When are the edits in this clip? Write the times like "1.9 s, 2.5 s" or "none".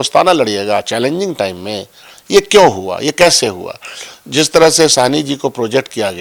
none